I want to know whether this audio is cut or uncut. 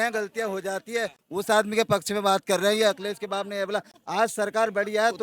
uncut